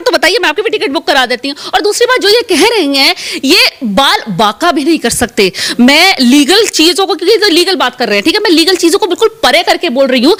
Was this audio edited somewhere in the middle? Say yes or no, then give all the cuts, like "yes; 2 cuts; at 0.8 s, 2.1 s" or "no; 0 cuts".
no; 0 cuts